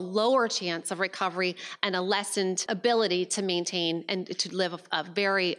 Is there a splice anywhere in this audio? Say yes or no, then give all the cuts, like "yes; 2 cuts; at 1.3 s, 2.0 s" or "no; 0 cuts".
yes; 1 cut; at 2.6 s